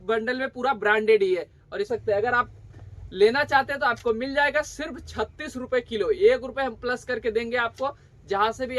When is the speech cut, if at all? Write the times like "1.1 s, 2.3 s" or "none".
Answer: 1.9 s

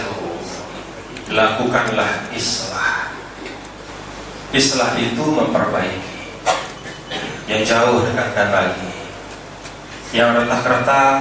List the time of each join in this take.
3.9 s

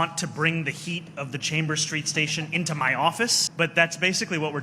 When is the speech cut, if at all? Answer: 3.4 s

